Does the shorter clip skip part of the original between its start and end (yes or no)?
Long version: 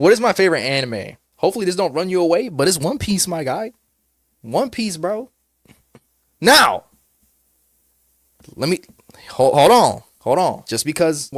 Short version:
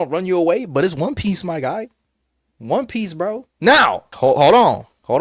yes